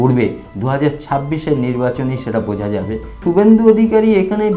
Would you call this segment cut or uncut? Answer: cut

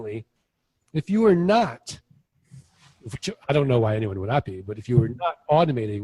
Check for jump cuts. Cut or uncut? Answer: cut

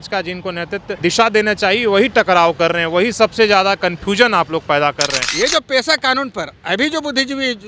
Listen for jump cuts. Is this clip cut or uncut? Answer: cut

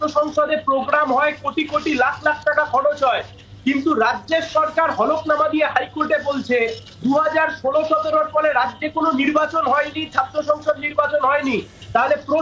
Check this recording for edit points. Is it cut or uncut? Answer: uncut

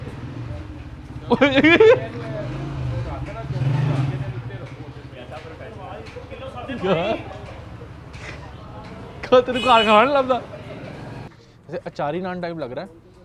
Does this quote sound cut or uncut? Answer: cut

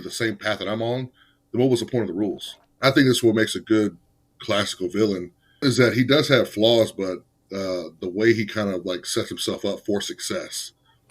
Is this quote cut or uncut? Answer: cut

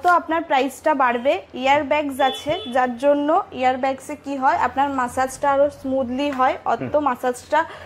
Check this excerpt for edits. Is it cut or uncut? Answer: uncut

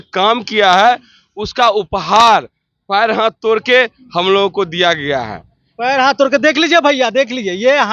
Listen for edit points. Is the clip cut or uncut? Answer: uncut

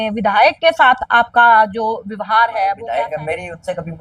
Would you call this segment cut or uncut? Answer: cut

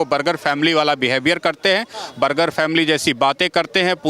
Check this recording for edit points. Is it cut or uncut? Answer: uncut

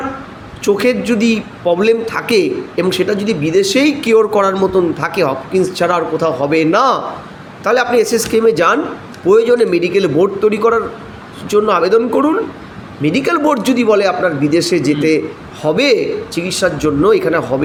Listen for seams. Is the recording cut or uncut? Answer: uncut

